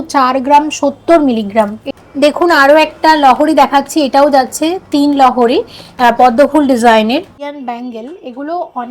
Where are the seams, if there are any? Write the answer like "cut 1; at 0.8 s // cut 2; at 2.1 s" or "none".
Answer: cut 1; at 1.8 s // cut 2; at 7.4 s